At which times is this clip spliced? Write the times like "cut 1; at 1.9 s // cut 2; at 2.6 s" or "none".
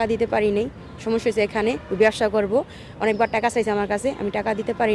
none